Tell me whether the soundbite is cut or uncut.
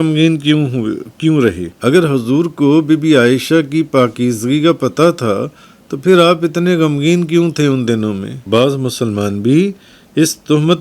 cut